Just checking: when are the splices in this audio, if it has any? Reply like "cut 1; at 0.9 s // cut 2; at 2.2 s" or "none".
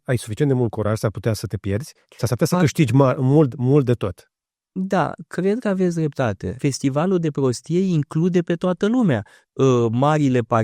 cut 1; at 6.6 s